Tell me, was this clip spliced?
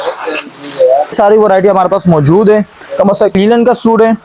yes; 2 cuts; at 1.1 s, 3.4 s

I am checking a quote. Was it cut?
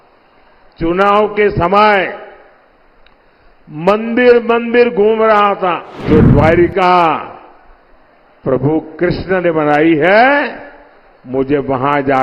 yes; 1 cut; at 6.0 s

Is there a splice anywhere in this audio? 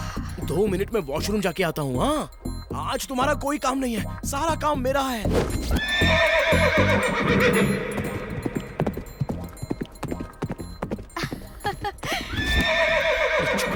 no; 0 cuts

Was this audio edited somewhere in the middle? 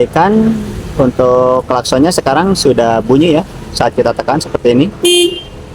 no; 0 cuts

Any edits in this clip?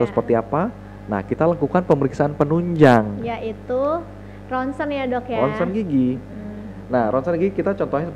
no; 0 cuts

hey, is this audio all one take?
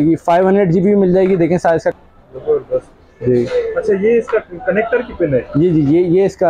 no; 1 cut; at 1.9 s

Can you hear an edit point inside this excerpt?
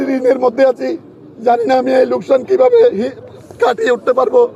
no; 0 cuts

